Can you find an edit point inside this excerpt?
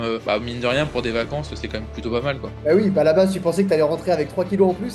no; 0 cuts

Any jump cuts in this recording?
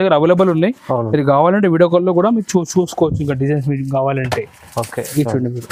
no; 0 cuts

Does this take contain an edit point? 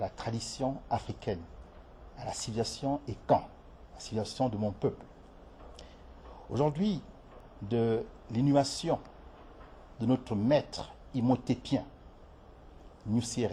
no; 0 cuts

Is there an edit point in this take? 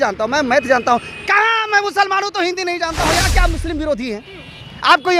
yes; 1 cut; at 3.3 s

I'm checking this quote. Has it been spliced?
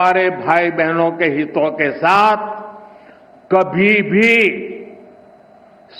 no; 0 cuts

